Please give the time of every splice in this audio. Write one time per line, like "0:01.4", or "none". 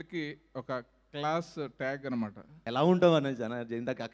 0:02.6